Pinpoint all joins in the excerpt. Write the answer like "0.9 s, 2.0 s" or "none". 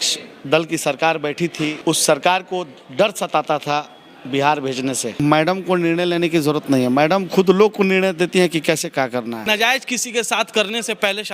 1.8 s, 5.2 s, 9.4 s